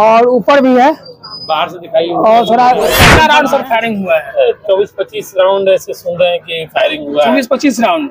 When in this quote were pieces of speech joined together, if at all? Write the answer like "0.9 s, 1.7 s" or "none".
3.1 s